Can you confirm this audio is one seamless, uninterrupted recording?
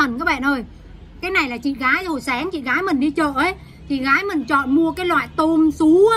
yes; 0 cuts

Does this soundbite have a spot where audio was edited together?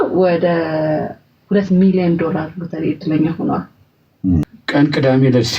yes; 1 cut; at 4.4 s

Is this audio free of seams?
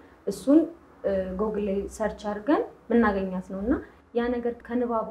yes; 0 cuts

